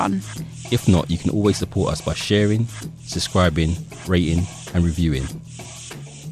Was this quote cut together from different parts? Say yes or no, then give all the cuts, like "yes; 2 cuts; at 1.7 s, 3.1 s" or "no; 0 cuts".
yes; 1 cut; at 5.3 s